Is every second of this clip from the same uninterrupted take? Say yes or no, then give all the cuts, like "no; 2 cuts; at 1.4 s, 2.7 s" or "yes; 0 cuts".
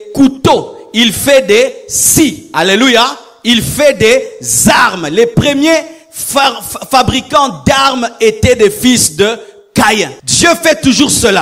no; 1 cut; at 10.2 s